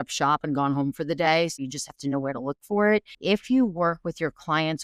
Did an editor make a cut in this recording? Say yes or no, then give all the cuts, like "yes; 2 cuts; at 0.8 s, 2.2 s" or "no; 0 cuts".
yes; 2 cuts; at 1.6 s, 3.1 s